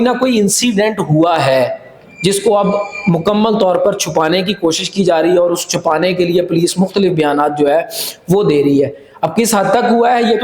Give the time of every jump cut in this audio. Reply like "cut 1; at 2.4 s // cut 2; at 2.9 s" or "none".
none